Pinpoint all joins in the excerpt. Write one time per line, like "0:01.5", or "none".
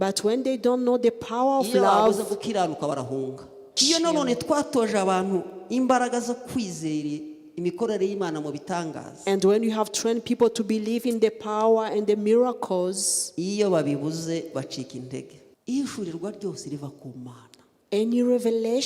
0:03.7
0:15.4